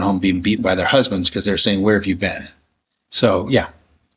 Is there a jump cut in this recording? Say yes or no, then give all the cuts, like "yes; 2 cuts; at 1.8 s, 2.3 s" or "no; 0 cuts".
no; 0 cuts